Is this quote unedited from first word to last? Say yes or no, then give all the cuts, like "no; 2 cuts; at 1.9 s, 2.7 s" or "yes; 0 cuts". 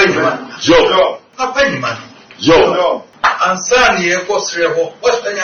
no; 2 cuts; at 1.3 s, 3.1 s